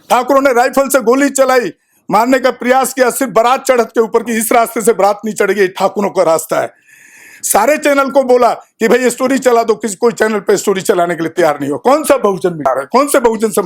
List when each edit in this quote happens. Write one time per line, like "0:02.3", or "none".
0:12.7